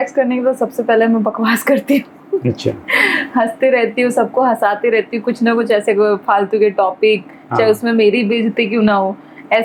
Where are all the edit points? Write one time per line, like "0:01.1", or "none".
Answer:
none